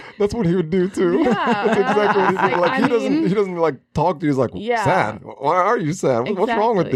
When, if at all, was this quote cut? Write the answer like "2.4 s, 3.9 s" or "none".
none